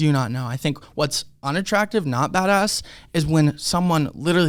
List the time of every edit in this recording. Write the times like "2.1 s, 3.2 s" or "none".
none